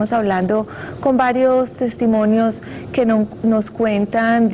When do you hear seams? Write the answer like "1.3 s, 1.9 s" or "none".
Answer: none